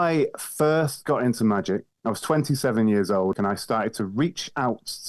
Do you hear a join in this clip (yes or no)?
yes